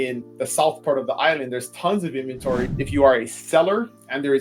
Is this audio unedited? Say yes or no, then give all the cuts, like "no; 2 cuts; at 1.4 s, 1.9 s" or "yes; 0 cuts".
no; 1 cut; at 2.7 s